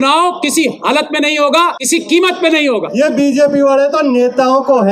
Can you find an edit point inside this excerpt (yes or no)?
yes